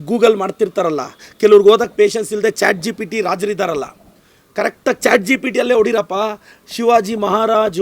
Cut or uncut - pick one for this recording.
uncut